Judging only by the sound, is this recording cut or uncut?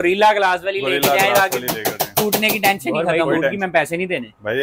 cut